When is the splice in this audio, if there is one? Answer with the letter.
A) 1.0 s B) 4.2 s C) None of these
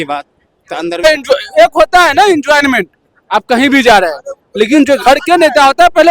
A